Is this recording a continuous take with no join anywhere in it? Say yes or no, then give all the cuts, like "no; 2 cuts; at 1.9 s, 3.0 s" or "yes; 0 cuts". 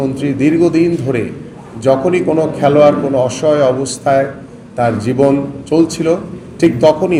yes; 0 cuts